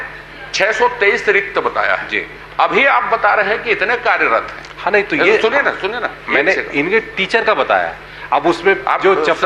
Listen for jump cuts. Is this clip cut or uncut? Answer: uncut